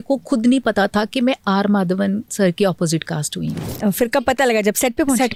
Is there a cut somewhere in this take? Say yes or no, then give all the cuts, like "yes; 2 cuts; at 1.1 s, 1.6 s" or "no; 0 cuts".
no; 0 cuts